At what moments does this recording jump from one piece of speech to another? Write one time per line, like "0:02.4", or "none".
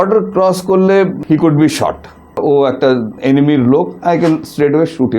0:02.3